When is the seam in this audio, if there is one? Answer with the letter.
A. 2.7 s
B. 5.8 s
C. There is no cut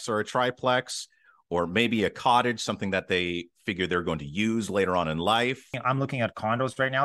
B